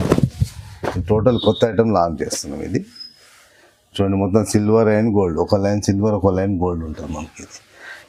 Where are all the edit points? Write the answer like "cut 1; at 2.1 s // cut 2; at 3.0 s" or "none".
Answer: none